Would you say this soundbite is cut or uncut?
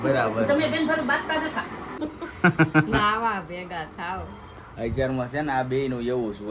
cut